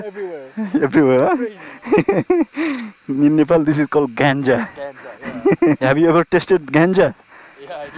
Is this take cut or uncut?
cut